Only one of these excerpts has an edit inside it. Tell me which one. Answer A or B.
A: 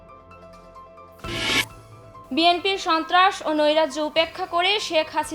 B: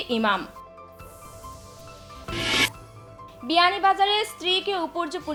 A